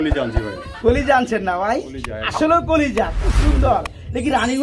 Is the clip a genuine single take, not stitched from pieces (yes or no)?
yes